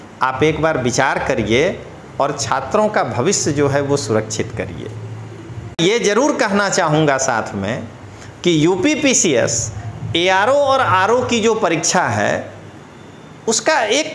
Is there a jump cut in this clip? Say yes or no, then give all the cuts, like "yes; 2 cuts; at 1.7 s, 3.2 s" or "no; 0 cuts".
yes; 1 cut; at 5.8 s